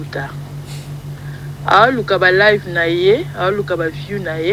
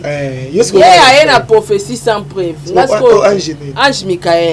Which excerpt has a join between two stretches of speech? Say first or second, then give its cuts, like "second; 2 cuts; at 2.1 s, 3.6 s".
second; 1 cut; at 3.6 s